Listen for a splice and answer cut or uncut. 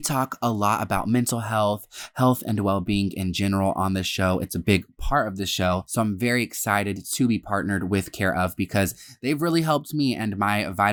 uncut